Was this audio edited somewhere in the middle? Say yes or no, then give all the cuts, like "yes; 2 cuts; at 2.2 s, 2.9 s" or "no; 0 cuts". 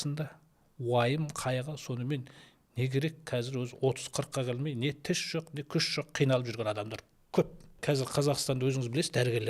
yes; 1 cut; at 7.7 s